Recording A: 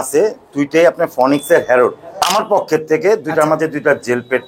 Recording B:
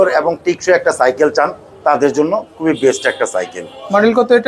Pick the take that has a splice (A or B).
A